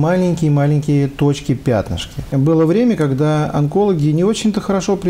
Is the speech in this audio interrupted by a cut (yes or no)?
yes